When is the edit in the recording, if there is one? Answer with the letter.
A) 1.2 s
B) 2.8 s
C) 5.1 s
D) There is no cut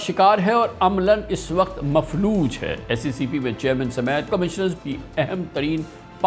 B